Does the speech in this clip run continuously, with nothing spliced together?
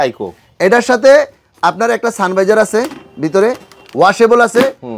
yes; 0 cuts

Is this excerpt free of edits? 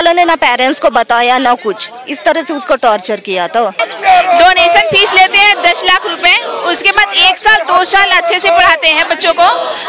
no; 1 cut; at 3.8 s

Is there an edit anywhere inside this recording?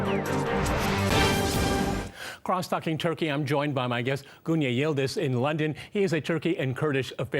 yes; 1 cut; at 6.2 s

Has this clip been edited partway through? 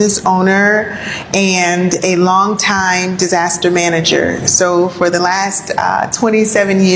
no; 0 cuts

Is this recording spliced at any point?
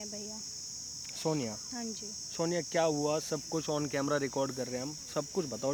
no; 0 cuts

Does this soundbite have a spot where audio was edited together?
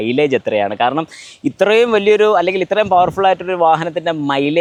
no; 0 cuts

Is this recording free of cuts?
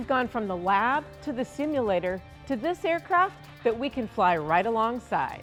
yes; 0 cuts

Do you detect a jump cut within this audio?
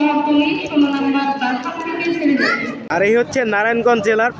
yes; 1 cut; at 2.8 s

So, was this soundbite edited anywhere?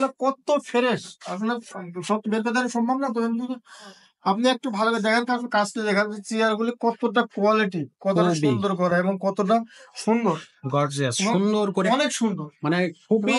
no; 0 cuts

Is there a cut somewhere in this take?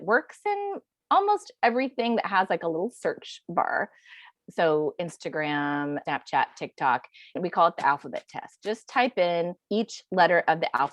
yes; 4 cuts; at 4.3 s, 6.0 s, 7.4 s, 9.6 s

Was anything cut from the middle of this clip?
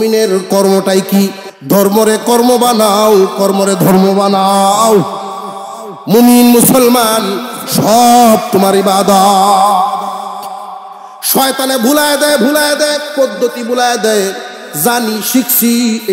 yes; 1 cut; at 1.5 s

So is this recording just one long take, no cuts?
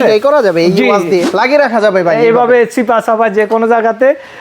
no; 1 cut; at 1.3 s

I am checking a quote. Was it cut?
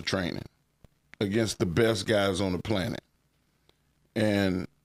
no; 0 cuts

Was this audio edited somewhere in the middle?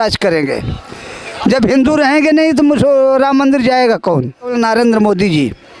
yes; 1 cut; at 4.5 s

